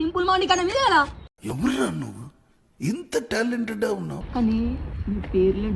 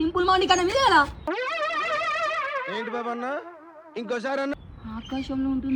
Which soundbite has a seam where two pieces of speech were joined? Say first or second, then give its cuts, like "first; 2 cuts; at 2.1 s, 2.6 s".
first; 2 cuts; at 1.1 s, 4.2 s